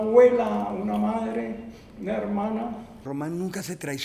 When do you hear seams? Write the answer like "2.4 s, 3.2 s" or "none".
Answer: 3.0 s